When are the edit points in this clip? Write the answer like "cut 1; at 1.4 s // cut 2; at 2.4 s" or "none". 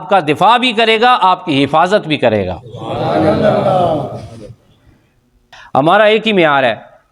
cut 1; at 5.5 s